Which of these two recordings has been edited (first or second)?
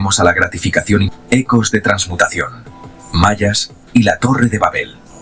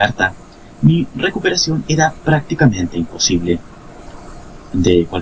first